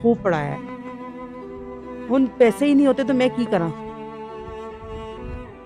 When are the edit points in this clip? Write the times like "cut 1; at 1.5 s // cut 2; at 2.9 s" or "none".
cut 1; at 4.3 s